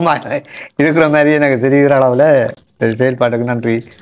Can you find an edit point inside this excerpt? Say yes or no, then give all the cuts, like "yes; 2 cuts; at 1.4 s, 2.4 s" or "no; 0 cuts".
no; 0 cuts